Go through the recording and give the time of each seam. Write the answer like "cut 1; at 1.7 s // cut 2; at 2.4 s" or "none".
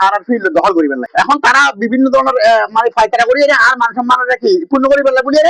cut 1; at 1.0 s

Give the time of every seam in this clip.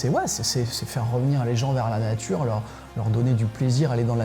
none

